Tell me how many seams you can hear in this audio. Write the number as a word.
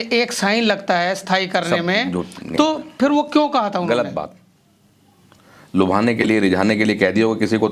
zero